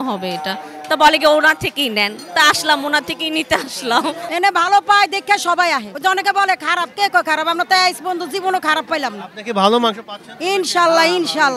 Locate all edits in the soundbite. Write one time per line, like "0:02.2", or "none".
0:04.2
0:05.9